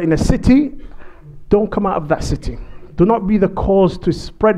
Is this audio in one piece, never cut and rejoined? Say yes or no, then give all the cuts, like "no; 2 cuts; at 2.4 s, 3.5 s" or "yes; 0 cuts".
yes; 0 cuts